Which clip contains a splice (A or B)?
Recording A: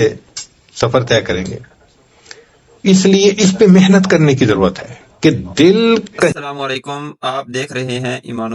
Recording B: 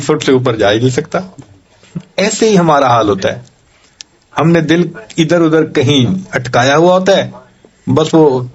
A